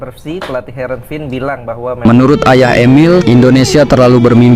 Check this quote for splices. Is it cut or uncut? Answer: cut